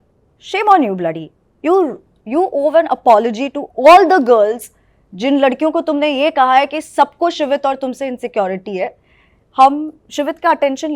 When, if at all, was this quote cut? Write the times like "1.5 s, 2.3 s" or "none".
none